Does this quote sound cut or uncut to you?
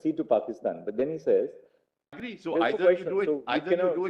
cut